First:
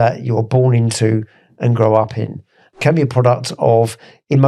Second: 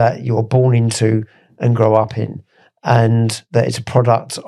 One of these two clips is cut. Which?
first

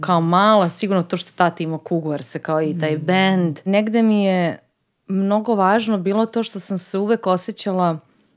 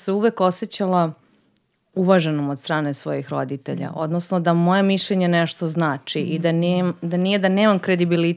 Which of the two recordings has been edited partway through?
first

